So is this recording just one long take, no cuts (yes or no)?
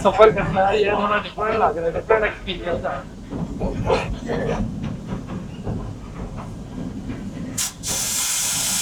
yes